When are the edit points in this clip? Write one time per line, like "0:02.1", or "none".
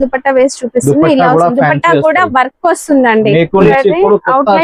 0:03.6